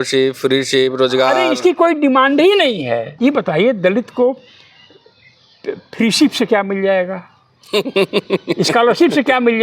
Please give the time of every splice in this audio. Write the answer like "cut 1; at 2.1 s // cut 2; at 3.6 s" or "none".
cut 1; at 3.1 s